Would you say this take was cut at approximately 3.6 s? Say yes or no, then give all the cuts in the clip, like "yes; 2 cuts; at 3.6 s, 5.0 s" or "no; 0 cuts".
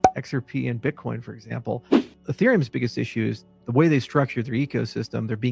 no; 1 cut; at 2.2 s